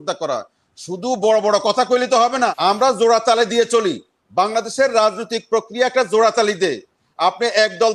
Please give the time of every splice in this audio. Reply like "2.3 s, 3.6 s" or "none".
2.6 s